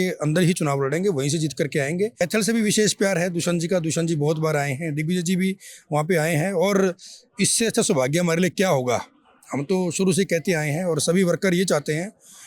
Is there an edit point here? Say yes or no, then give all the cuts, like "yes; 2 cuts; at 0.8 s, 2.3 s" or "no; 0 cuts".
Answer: yes; 1 cut; at 2.2 s